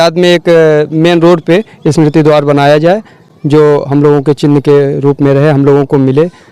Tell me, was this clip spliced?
no; 0 cuts

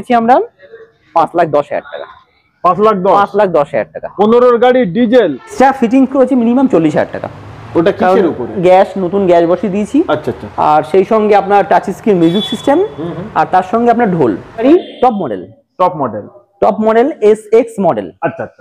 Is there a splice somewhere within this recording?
yes; 2 cuts; at 5.5 s, 14.6 s

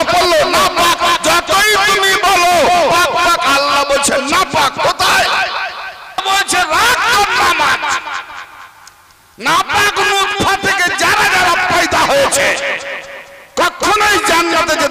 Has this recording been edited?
yes; 1 cut; at 6.2 s

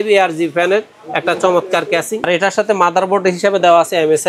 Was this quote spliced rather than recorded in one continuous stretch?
yes; 1 cut; at 2.3 s

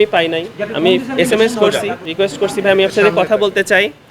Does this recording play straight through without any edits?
no; 1 cut; at 2.0 s

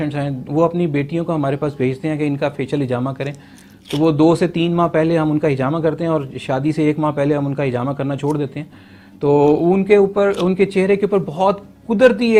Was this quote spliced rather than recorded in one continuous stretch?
no; 0 cuts

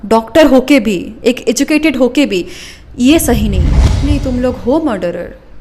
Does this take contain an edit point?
yes; 1 cut; at 4.0 s

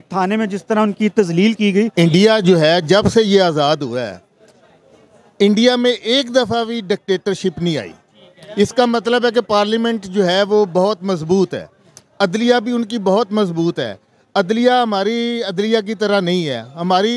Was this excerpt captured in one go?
no; 1 cut; at 1.9 s

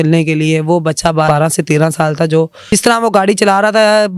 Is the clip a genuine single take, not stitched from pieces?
no; 2 cuts; at 1.3 s, 2.7 s

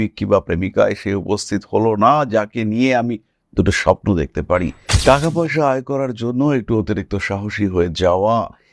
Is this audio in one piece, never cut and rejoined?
no; 1 cut; at 4.8 s

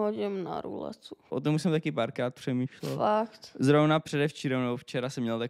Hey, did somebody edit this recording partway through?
yes; 1 cut; at 1.3 s

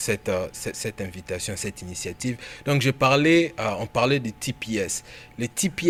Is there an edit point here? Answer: no; 0 cuts

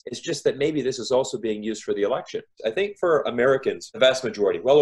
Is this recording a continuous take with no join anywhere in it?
no; 2 cuts; at 2.5 s, 3.9 s

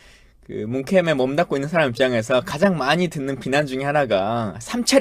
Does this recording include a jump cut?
yes; 1 cut; at 2.2 s

